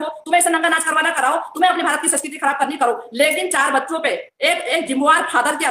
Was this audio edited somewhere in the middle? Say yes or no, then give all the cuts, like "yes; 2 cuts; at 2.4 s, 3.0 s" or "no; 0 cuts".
no; 0 cuts